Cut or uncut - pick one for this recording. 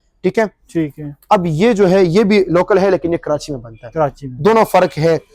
uncut